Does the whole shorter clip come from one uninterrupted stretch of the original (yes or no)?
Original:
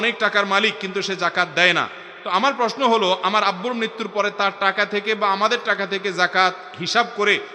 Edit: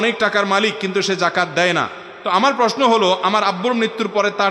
yes